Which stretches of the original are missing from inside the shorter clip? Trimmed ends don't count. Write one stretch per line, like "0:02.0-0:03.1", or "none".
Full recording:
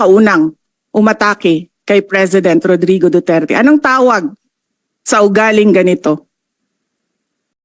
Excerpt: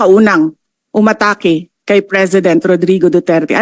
none